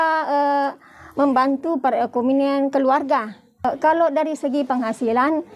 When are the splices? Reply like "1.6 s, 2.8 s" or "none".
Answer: 3.4 s